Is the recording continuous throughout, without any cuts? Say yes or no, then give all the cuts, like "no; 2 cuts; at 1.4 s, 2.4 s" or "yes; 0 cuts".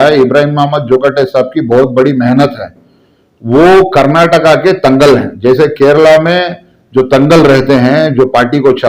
yes; 0 cuts